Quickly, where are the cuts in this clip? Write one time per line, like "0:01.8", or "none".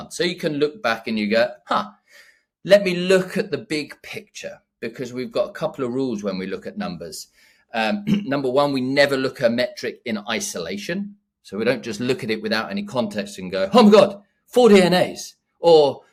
none